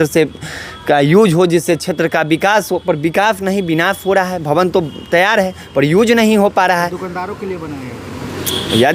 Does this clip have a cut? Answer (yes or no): no